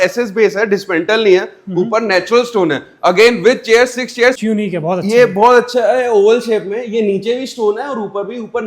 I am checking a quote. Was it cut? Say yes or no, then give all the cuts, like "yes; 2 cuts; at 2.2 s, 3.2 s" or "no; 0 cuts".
yes; 1 cut; at 4.4 s